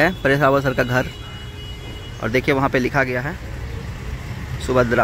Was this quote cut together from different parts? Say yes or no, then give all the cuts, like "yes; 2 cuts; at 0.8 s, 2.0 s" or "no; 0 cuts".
no; 0 cuts